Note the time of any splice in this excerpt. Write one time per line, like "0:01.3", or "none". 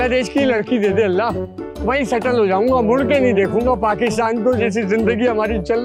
none